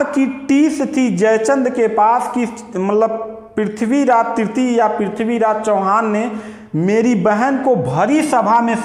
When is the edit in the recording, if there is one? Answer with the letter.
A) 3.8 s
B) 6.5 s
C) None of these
C